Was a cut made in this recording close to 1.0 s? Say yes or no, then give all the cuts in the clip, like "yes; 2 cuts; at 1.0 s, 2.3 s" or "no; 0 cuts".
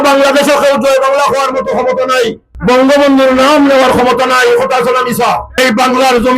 no; 2 cuts; at 2.5 s, 5.5 s